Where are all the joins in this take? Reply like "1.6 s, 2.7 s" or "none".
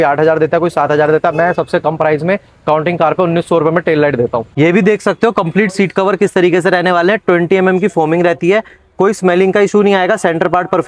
4.5 s